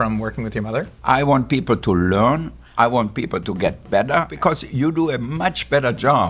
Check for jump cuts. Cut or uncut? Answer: cut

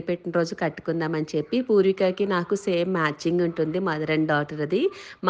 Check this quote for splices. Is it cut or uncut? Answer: uncut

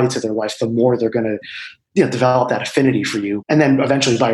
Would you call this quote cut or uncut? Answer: cut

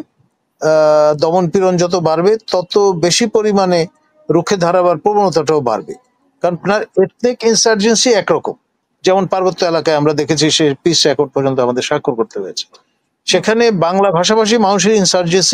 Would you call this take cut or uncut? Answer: cut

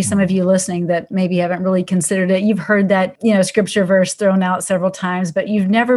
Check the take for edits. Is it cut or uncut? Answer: cut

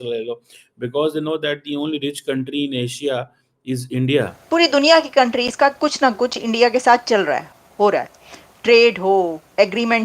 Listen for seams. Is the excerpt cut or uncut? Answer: cut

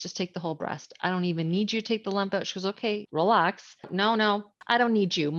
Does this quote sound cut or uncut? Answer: cut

